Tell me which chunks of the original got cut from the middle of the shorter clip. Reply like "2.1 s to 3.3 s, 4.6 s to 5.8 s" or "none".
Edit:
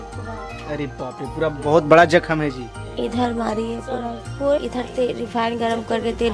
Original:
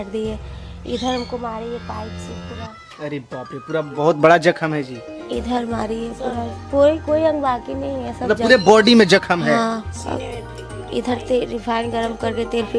6.9 s to 10.9 s